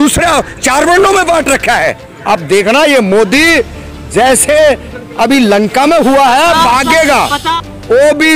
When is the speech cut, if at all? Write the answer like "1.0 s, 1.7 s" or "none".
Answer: 2.1 s, 7.5 s